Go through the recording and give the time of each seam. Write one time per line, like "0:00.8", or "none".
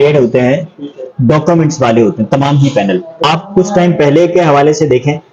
0:03.2